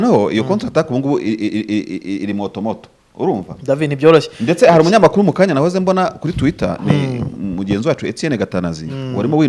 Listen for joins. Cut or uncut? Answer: uncut